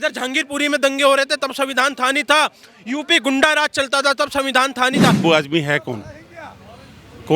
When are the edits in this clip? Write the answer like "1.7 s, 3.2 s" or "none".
5.2 s